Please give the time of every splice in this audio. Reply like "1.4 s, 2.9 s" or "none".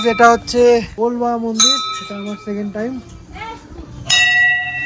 0.9 s